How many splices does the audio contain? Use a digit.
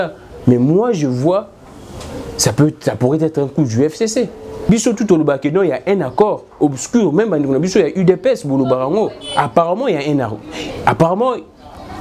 1